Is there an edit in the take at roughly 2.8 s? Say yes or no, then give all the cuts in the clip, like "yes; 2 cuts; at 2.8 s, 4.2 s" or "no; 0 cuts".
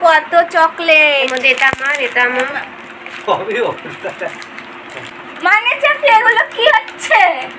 no; 1 cut; at 5.1 s